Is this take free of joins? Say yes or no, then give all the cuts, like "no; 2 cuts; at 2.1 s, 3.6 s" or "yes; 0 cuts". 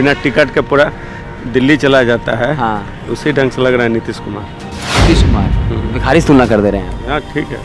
yes; 0 cuts